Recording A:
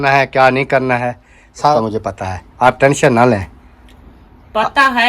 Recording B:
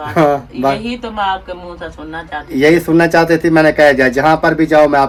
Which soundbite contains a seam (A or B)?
A